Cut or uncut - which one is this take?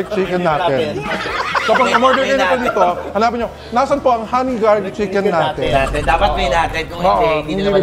uncut